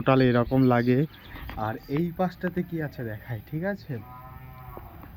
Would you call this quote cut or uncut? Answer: uncut